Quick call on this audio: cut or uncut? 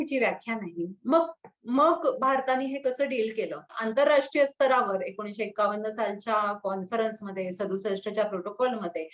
cut